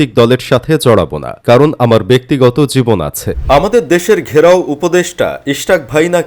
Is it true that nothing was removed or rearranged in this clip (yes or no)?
no